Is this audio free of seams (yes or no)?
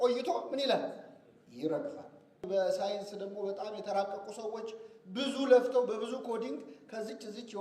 no